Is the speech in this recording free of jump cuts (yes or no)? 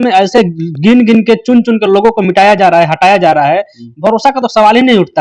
yes